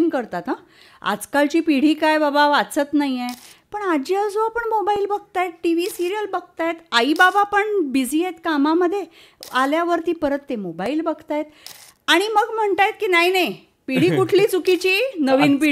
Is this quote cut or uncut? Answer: uncut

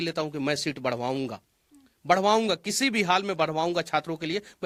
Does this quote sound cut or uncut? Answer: uncut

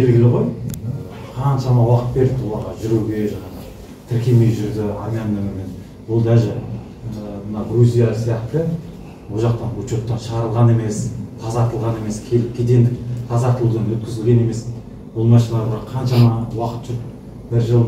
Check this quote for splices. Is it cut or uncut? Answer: uncut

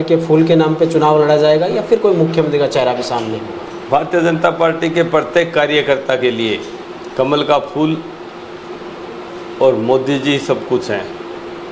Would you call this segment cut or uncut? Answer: uncut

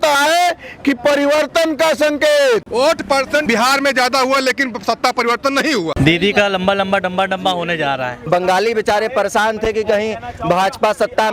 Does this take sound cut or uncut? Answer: cut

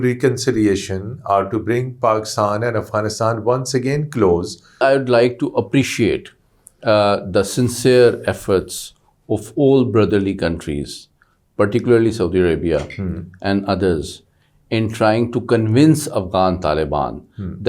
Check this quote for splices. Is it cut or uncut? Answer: cut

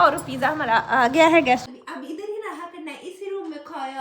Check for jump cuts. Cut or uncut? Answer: cut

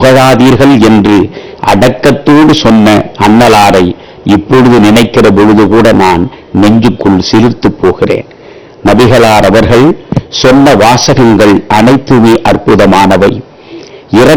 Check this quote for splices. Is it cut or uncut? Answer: uncut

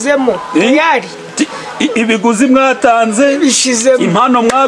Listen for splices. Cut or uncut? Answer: uncut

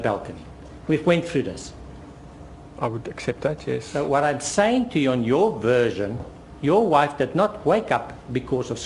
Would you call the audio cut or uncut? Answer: cut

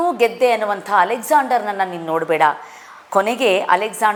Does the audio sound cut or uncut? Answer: uncut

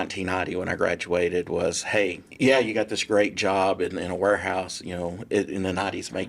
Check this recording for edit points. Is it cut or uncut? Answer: cut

